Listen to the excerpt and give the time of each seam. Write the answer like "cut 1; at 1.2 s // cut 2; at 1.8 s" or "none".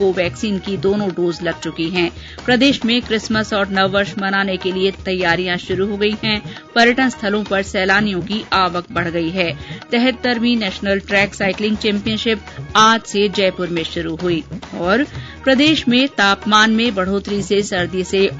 cut 1; at 5.0 s

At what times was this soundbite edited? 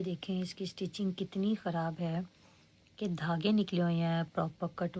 none

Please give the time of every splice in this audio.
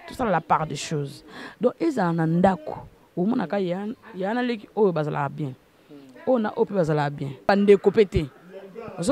cut 1; at 7.5 s

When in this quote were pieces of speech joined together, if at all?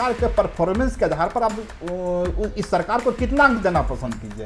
none

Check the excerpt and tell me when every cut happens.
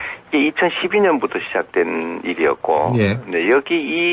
cut 1; at 2.1 s

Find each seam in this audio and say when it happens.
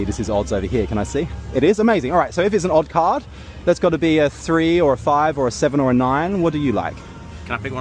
cut 1; at 2.5 s

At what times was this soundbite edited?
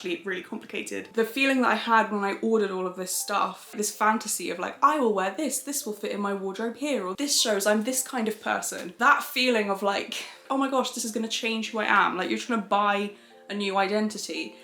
cut 1; at 1.1 s // cut 2; at 3.7 s // cut 3; at 10.4 s

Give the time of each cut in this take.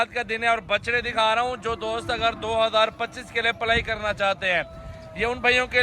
none

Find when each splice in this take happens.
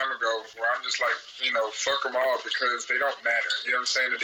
none

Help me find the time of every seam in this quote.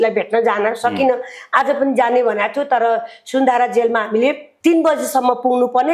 cut 1; at 4.5 s

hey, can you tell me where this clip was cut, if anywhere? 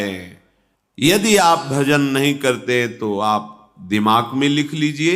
cut 1; at 1.0 s

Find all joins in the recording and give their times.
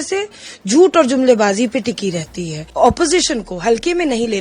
cut 1; at 2.6 s

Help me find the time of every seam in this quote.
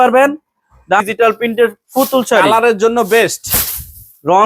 cut 1; at 1.0 s

